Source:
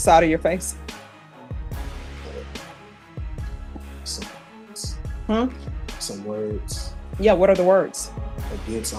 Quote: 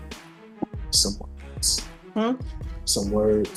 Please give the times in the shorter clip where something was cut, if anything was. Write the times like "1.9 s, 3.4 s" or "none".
none